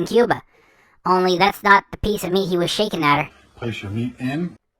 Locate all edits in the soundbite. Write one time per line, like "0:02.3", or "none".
0:03.4